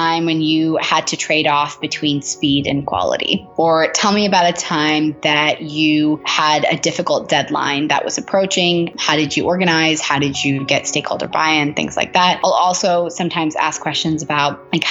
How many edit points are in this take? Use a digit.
1